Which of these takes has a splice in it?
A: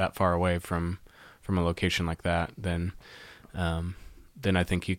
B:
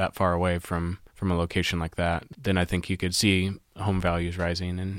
B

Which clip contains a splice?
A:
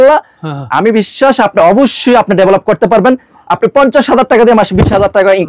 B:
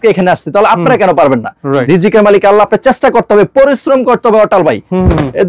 B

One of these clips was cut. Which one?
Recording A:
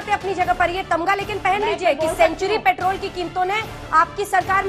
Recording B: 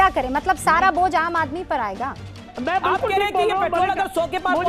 B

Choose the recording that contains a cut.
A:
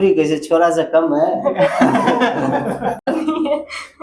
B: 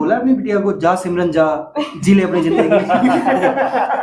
A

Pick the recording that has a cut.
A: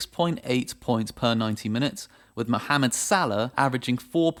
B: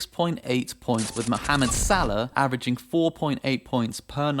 B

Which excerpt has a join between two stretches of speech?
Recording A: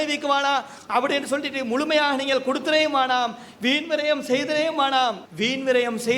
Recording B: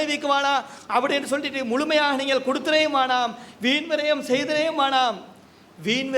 A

